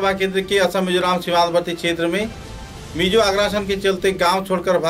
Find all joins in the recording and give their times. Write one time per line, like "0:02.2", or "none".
none